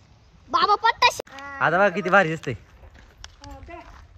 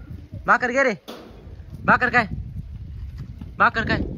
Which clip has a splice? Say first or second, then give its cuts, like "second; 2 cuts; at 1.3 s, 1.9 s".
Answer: first; 1 cut; at 1.2 s